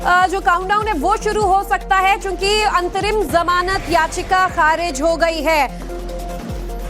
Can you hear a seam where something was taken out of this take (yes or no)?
no